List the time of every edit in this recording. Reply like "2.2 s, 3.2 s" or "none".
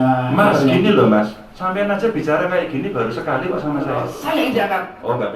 4.1 s